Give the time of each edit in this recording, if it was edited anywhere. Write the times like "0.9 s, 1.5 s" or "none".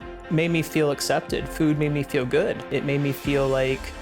2.7 s